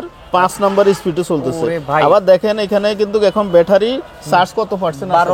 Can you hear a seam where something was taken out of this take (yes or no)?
no